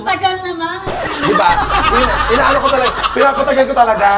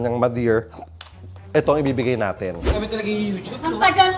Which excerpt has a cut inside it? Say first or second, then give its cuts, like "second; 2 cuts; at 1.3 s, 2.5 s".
second; 1 cut; at 2.8 s